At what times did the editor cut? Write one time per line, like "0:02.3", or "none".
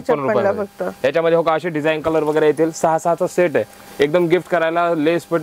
none